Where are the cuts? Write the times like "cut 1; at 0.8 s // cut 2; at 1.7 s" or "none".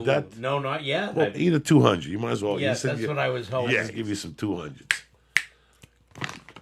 cut 1; at 3.9 s